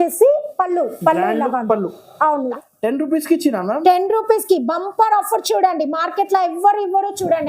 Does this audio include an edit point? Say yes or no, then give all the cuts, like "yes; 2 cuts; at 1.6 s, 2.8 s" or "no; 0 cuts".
yes; 1 cut; at 2.5 s